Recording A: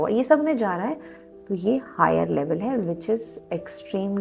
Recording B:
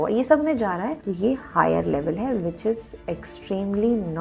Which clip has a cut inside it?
B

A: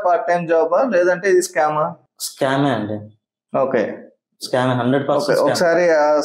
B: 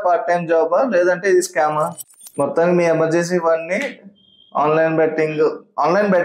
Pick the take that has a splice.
B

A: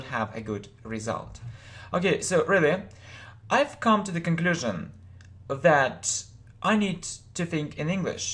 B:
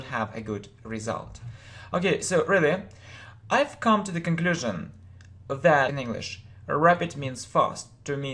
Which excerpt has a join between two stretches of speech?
A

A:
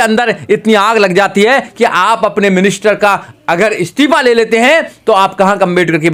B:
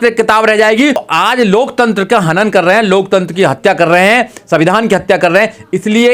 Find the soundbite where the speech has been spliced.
B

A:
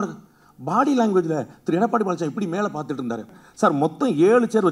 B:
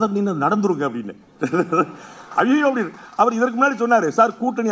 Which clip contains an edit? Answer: A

